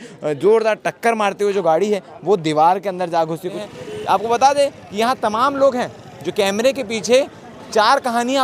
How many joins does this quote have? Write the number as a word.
one